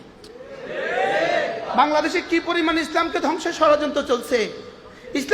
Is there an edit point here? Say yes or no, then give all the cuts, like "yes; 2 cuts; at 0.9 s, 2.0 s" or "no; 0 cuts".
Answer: yes; 1 cut; at 1.7 s